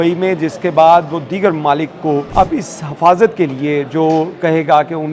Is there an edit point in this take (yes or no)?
yes